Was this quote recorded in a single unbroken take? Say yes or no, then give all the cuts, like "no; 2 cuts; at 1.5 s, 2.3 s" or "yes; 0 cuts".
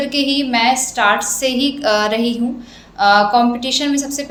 yes; 0 cuts